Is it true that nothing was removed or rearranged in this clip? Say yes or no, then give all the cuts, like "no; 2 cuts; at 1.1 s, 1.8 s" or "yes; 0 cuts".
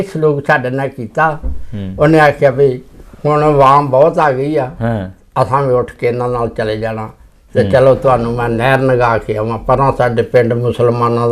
yes; 0 cuts